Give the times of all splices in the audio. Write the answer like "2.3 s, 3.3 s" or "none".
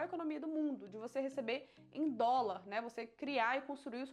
none